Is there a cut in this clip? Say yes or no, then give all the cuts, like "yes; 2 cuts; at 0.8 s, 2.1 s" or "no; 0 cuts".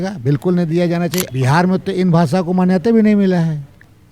yes; 1 cut; at 1.3 s